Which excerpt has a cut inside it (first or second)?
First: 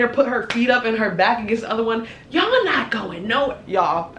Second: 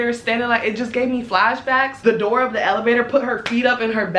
second